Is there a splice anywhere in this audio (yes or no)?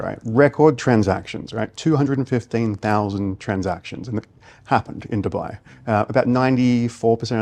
no